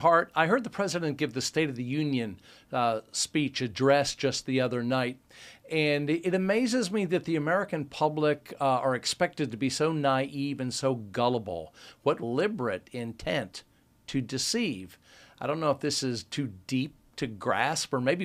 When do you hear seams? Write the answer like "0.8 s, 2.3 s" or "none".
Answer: none